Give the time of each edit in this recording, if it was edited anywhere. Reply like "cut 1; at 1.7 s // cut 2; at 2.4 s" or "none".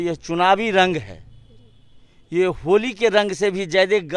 none